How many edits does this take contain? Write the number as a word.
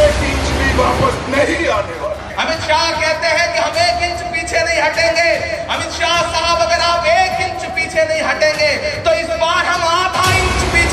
zero